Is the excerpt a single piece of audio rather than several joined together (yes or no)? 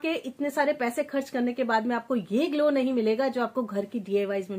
yes